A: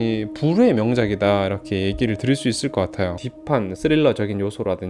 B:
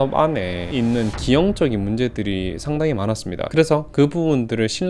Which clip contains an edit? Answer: A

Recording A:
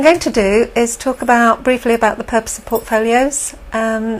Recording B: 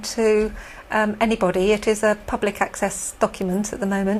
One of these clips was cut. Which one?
B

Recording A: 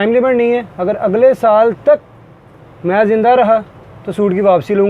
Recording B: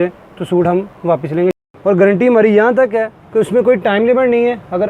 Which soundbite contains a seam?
B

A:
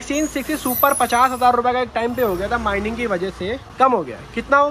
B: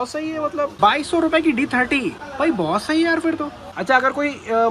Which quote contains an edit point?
B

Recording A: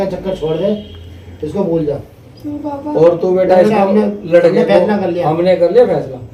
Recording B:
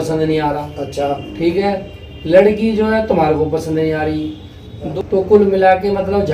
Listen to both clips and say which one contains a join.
B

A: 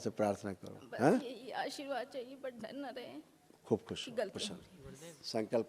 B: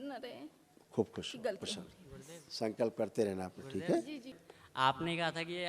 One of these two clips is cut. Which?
B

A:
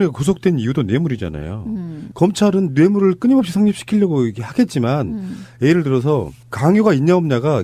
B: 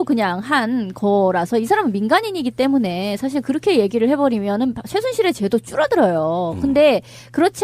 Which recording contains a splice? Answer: B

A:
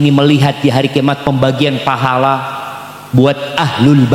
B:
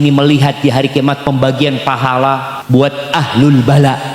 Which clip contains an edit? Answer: B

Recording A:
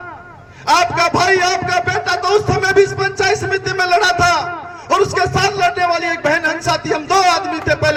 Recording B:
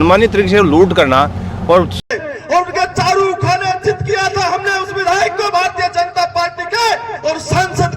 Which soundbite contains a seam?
B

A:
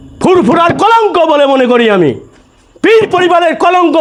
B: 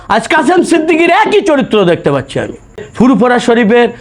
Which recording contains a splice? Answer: B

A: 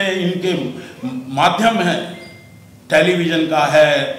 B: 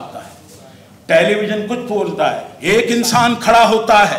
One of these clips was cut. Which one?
B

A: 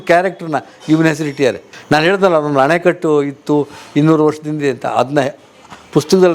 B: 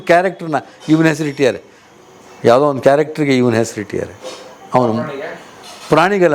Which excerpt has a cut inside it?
A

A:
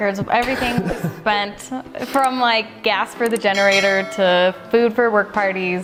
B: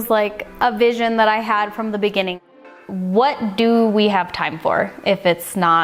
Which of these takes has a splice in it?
B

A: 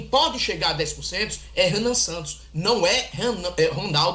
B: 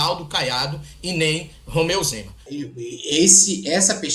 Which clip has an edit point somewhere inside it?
B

